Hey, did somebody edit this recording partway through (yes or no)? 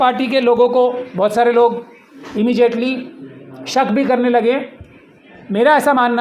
no